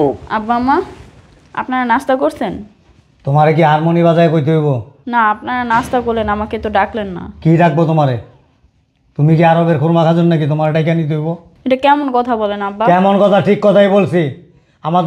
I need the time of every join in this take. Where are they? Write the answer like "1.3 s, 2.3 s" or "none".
4.9 s, 11.5 s